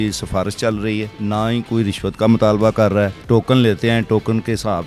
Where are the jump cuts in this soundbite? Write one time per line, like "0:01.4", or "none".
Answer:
0:01.1
0:03.2